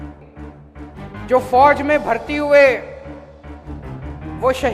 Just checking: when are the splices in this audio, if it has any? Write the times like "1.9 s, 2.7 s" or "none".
1.2 s